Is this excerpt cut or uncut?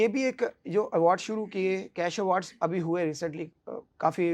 uncut